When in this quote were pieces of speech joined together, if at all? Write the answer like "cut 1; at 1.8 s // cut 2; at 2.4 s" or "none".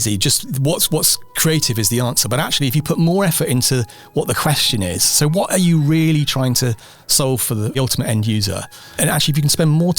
cut 1; at 7.8 s // cut 2; at 9.0 s